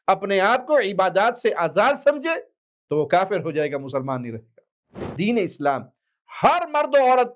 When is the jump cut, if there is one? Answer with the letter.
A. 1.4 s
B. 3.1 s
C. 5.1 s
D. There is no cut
C